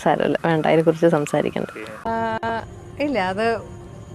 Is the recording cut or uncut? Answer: cut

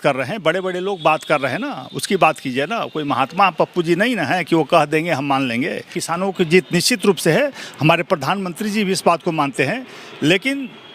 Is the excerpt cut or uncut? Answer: cut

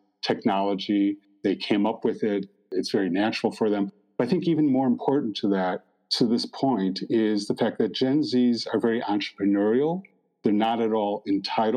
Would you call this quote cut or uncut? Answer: uncut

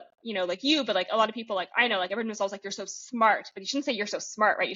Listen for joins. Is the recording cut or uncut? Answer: uncut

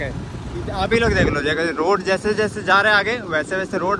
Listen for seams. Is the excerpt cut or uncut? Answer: uncut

